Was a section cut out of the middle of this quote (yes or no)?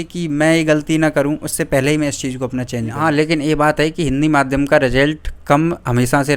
yes